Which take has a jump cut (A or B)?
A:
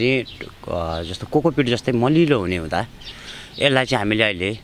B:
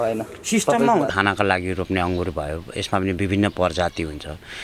B